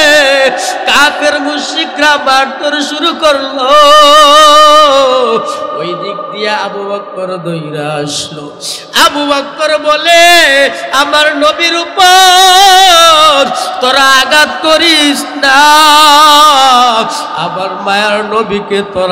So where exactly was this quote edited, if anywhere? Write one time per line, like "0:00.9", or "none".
none